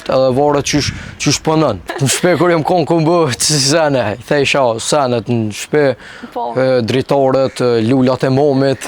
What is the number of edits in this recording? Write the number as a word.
one